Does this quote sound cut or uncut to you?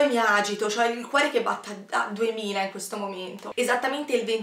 cut